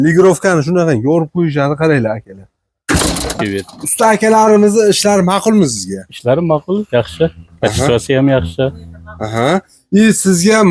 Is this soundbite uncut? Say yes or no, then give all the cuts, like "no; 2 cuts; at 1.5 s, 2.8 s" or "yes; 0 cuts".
no; 1 cut; at 3.4 s